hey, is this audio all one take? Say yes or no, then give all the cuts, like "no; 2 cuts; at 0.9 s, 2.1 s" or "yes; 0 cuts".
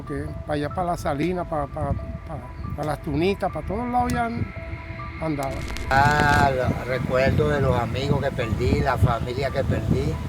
no; 1 cut; at 5.9 s